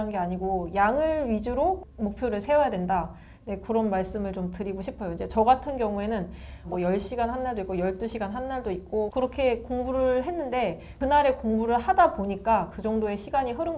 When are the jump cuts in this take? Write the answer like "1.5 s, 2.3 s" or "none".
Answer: 1.9 s, 6.7 s, 9.1 s, 10.9 s